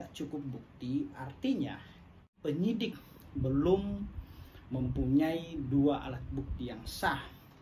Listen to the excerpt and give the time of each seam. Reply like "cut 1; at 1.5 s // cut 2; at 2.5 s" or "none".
cut 1; at 2.4 s

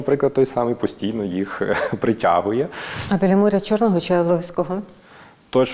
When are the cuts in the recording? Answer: cut 1; at 2.9 s

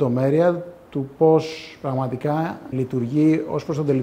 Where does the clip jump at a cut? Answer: cut 1; at 2.7 s

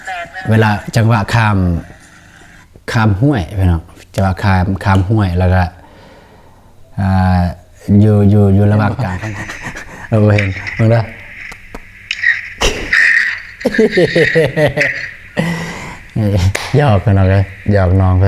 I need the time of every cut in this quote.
cut 1; at 9.1 s

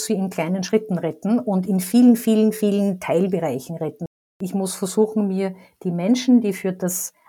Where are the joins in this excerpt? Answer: cut 1; at 4.3 s

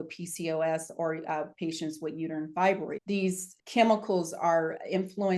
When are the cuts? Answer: cut 1; at 3.6 s

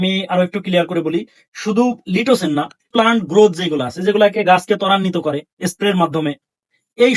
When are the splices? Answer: cut 1; at 2.9 s

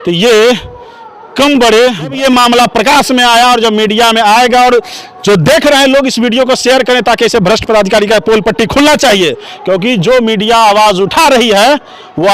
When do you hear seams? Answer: cut 1; at 2.1 s

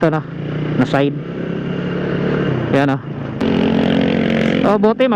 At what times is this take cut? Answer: cut 1; at 3.4 s

